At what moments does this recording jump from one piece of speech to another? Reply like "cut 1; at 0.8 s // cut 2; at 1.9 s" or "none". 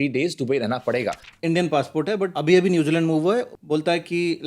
cut 1; at 1.3 s // cut 2; at 2.3 s // cut 3; at 3.6 s